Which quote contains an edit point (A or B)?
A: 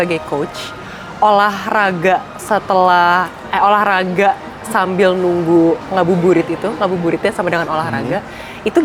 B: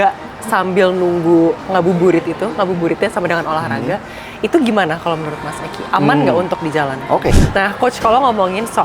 B